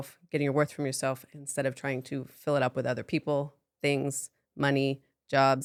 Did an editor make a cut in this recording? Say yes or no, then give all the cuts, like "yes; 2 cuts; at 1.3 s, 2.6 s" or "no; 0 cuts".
no; 0 cuts